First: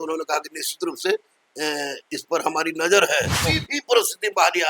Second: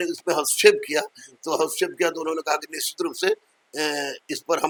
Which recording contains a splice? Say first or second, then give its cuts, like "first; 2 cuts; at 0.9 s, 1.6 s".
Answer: first; 1 cut; at 3.5 s